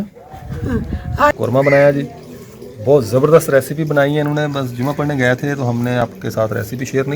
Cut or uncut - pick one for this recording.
cut